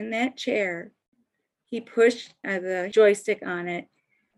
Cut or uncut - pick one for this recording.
cut